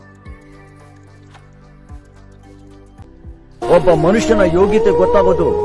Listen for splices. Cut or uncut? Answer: cut